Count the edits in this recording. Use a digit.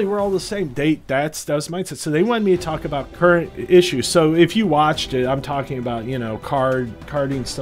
1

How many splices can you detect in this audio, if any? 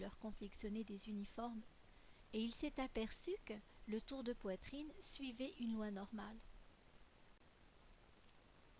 1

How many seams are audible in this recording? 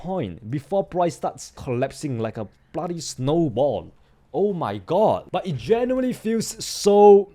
2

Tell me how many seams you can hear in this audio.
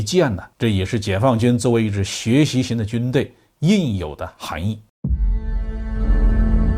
1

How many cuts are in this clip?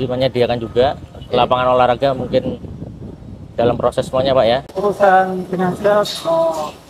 1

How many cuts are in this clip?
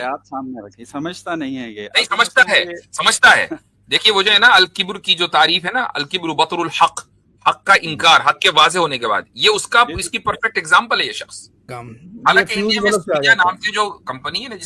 1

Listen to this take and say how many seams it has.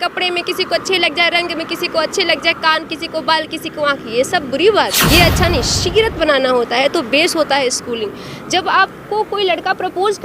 1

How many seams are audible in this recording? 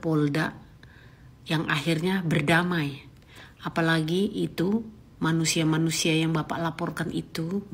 0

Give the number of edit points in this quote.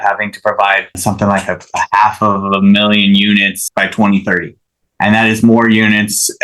2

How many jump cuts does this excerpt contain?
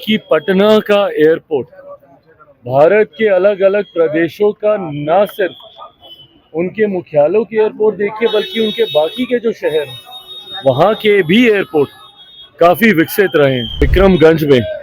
1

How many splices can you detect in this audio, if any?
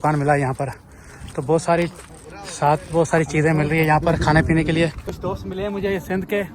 1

